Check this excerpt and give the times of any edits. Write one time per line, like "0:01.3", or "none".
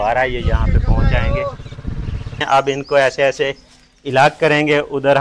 0:02.4